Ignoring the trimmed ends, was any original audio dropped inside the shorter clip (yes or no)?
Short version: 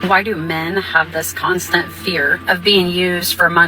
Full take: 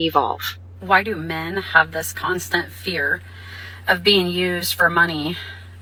yes